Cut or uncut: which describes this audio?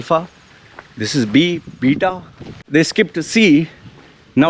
cut